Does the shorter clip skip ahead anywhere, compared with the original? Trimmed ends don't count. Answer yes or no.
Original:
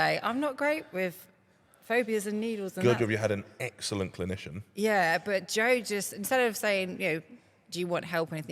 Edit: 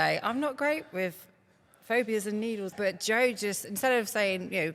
yes